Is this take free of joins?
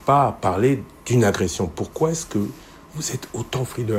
yes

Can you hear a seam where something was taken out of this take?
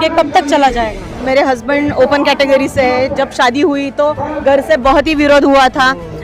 yes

